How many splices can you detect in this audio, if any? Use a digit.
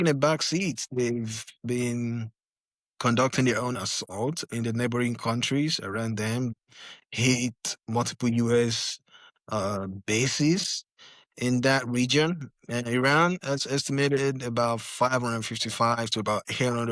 1